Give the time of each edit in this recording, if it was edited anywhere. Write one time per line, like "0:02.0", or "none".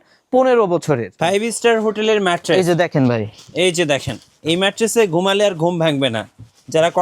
0:01.1